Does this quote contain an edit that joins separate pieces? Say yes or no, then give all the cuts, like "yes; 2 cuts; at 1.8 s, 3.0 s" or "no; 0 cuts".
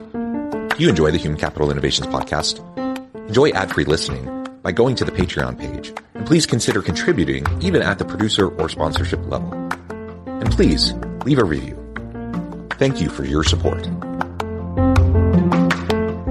no; 0 cuts